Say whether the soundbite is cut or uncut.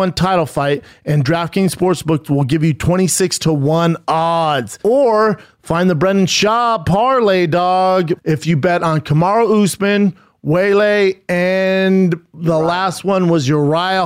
cut